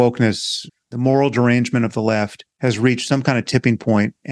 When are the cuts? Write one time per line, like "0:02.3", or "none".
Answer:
0:02.4